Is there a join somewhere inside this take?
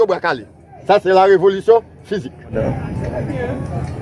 yes; 1 cut; at 2.5 s

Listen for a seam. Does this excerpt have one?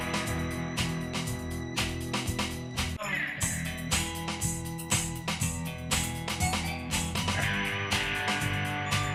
no; 0 cuts

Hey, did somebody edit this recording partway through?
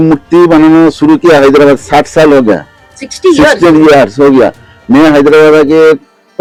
no; 0 cuts

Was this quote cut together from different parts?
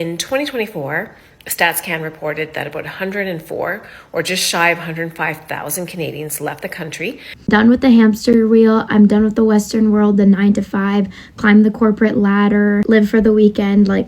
yes; 1 cut; at 7.3 s

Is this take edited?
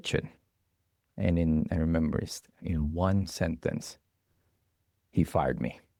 no; 0 cuts

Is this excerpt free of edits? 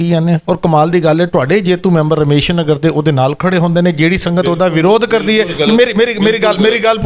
yes; 0 cuts

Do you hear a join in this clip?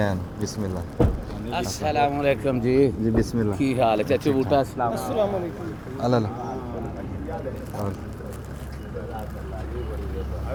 no; 0 cuts

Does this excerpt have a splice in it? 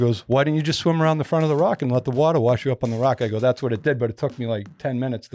no; 0 cuts

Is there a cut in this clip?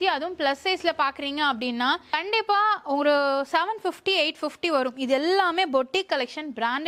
no; 0 cuts

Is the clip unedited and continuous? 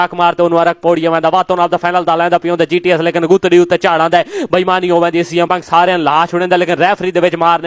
no; 1 cut; at 5.5 s

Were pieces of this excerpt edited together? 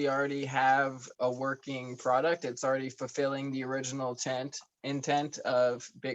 yes; 1 cut; at 1.0 s

